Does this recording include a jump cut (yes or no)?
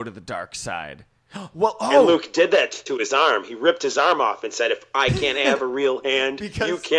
no